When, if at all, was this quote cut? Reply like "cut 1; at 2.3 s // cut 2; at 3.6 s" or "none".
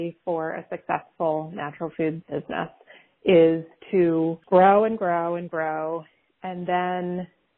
cut 1; at 2.2 s // cut 2; at 4.4 s